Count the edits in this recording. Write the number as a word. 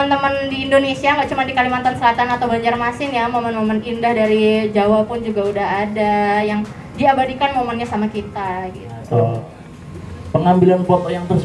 one